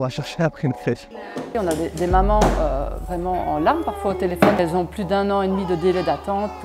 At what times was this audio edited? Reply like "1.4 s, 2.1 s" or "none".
1.5 s, 4.6 s

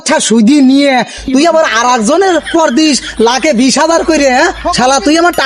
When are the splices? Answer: none

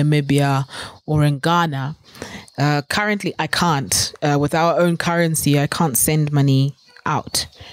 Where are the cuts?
none

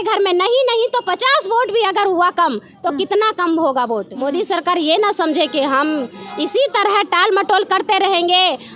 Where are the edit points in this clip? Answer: 4.1 s

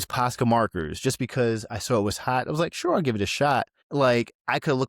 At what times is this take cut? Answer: none

